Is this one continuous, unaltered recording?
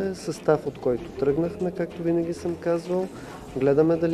yes; 0 cuts

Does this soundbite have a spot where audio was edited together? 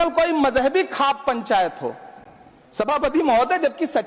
no; 0 cuts

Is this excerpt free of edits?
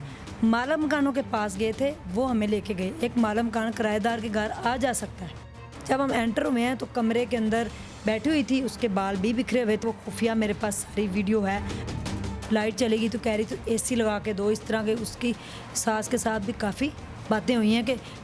no; 3 cuts; at 5.6 s, 9.8 s, 12.0 s

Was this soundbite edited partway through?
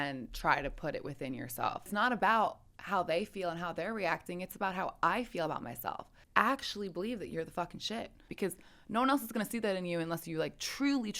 yes; 3 cuts; at 1.9 s, 6.1 s, 8.3 s

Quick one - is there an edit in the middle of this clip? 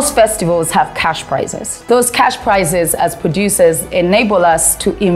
yes; 1 cut; at 1.8 s

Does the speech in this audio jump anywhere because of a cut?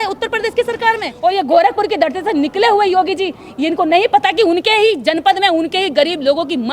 yes; 1 cut; at 1.1 s

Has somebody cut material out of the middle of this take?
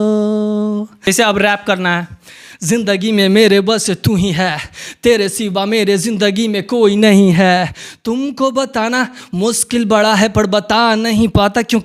yes; 1 cut; at 1.0 s

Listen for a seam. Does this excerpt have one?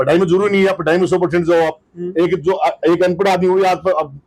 no; 0 cuts

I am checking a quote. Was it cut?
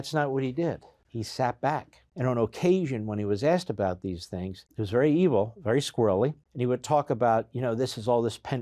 yes; 4 cuts; at 1.0 s, 2.0 s, 4.7 s, 6.5 s

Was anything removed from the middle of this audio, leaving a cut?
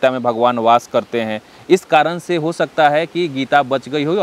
no; 0 cuts

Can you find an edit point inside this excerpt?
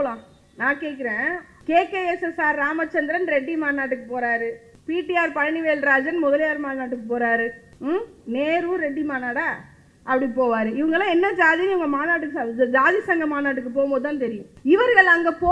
yes; 4 cuts; at 1.5 s, 4.7 s, 7.7 s, 14.5 s

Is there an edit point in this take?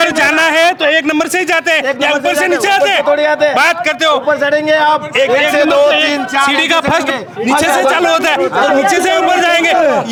no; 0 cuts

